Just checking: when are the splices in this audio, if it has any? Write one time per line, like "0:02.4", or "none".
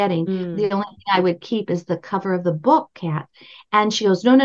none